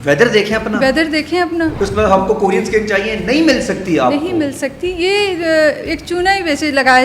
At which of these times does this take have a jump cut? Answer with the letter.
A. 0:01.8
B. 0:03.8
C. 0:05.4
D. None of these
A